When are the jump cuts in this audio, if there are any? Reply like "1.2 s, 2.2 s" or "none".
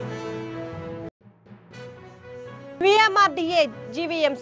1.1 s